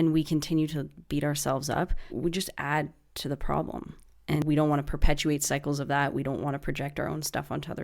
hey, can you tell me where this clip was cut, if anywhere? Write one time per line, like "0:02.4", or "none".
0:02.0
0:04.4